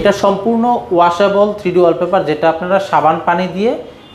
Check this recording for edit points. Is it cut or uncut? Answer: uncut